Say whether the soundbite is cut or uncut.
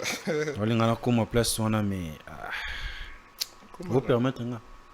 uncut